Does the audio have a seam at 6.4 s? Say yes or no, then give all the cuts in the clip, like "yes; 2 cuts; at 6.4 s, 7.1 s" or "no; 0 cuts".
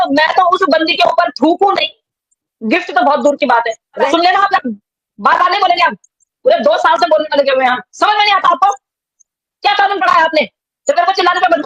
yes; 2 cuts; at 4.0 s, 6.4 s